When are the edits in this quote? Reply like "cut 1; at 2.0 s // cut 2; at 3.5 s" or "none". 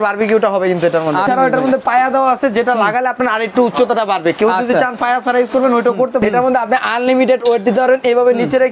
cut 1; at 1.3 s // cut 2; at 6.2 s